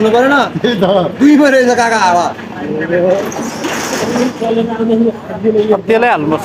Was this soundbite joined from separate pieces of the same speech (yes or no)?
no